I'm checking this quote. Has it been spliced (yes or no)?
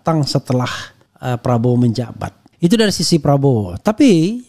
yes